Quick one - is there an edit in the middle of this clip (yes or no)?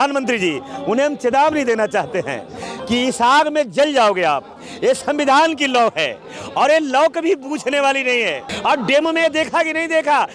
yes